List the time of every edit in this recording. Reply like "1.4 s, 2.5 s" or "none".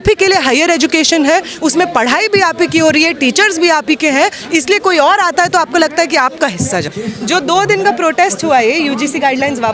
6.9 s